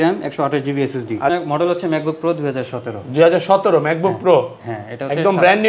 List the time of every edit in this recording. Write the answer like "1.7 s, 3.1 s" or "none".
1.3 s